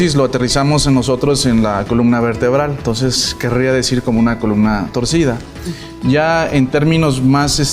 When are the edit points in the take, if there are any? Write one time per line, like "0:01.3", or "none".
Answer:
0:04.4